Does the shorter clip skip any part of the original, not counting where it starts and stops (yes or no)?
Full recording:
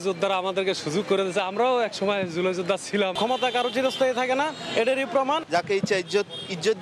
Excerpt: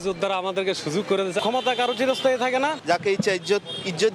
yes